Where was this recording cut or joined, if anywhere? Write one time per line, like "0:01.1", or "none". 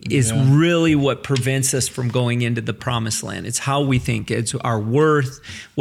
none